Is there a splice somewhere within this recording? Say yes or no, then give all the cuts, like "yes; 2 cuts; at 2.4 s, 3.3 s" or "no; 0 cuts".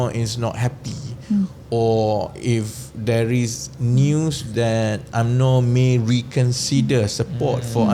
no; 0 cuts